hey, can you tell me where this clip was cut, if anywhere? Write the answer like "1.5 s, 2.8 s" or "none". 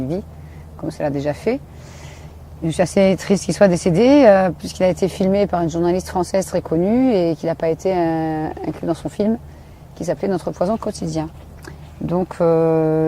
9.9 s